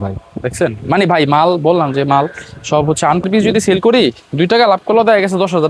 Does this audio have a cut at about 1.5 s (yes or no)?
no